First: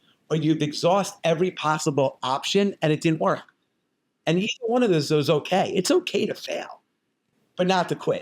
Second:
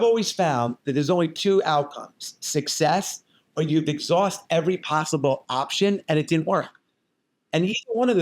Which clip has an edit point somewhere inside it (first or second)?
first